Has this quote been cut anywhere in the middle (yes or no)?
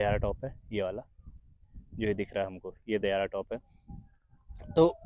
no